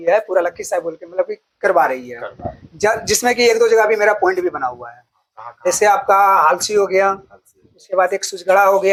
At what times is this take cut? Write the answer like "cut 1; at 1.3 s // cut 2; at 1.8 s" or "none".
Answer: none